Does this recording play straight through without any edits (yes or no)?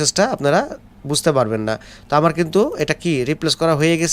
yes